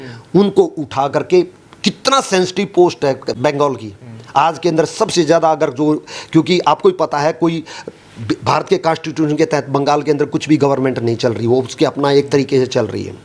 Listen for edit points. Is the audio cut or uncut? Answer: cut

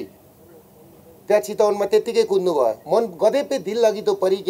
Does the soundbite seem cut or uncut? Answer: cut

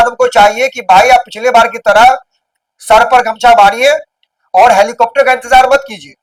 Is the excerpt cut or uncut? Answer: uncut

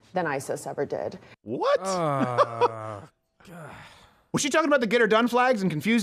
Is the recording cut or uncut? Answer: uncut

